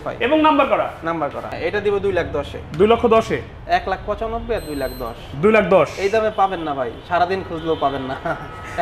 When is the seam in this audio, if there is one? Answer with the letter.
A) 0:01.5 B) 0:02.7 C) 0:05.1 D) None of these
A